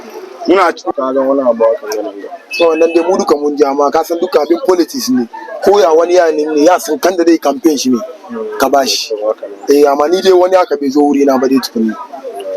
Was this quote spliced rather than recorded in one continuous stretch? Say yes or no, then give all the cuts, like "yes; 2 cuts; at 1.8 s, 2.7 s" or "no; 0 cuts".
yes; 1 cut; at 0.9 s